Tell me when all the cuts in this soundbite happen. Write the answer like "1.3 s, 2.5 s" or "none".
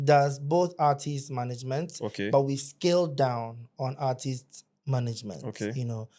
none